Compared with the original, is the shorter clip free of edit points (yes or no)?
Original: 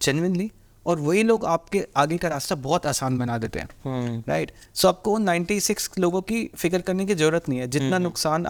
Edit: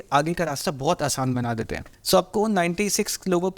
no